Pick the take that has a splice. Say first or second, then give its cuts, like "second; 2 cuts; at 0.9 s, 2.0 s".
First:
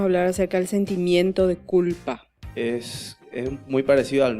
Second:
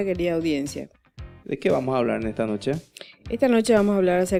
first; 1 cut; at 2.6 s